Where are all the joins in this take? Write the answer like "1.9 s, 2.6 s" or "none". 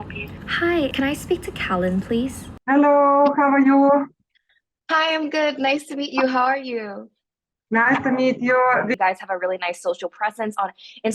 0.8 s, 2.5 s, 8.9 s